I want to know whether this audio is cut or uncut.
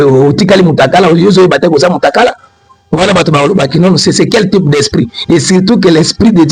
uncut